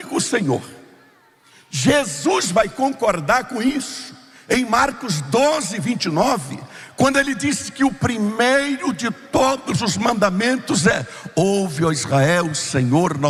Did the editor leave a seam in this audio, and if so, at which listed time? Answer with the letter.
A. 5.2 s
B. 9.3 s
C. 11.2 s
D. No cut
D